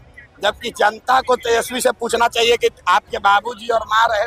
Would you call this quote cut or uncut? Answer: uncut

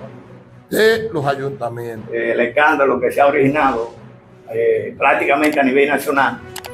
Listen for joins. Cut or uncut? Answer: cut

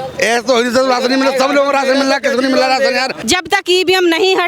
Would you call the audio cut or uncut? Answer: cut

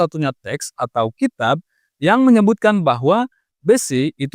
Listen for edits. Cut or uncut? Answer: uncut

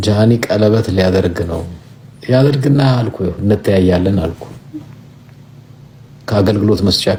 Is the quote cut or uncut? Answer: uncut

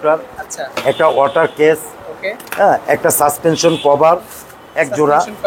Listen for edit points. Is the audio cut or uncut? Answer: uncut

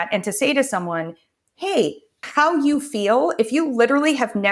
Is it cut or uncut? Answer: cut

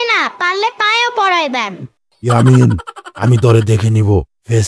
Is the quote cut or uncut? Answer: uncut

